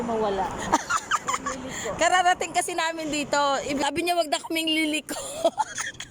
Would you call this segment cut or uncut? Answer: cut